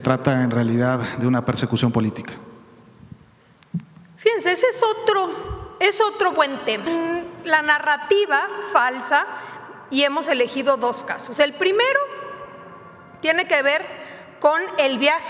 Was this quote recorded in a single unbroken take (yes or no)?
no